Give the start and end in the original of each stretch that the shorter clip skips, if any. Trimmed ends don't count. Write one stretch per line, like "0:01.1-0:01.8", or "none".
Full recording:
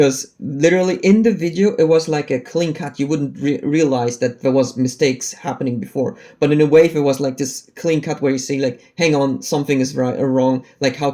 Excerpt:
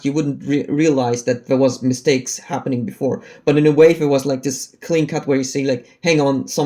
none